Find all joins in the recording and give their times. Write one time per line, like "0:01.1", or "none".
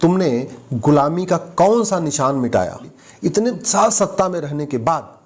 0:03.0